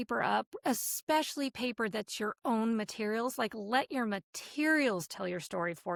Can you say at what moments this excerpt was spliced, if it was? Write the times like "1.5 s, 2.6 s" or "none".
none